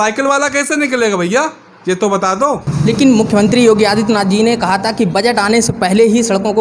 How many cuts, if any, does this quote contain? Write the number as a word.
one